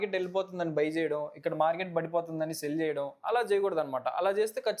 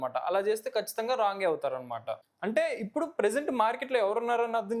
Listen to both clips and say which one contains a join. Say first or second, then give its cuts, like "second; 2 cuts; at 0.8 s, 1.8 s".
second; 1 cut; at 2.1 s